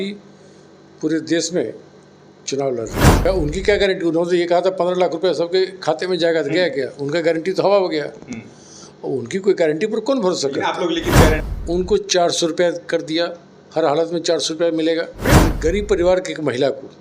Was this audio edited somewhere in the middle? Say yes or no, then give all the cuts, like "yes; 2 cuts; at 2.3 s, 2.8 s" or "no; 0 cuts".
yes; 3 cuts; at 3.3 s, 11.5 s, 15.4 s